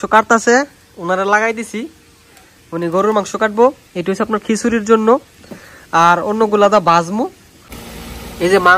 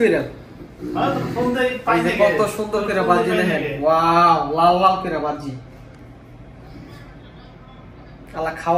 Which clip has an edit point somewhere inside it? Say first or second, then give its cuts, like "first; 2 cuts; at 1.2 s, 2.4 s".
first; 1 cut; at 7.7 s